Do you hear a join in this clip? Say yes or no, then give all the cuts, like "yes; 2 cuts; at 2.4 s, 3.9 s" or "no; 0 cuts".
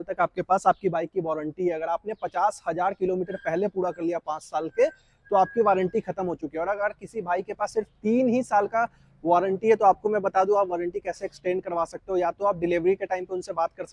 no; 0 cuts